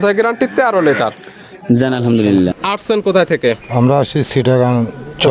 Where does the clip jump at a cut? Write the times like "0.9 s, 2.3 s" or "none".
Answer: 2.5 s